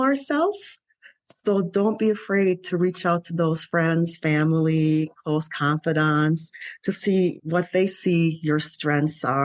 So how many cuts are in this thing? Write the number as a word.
one